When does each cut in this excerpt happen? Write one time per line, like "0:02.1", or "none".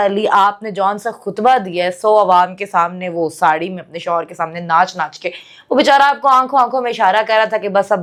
none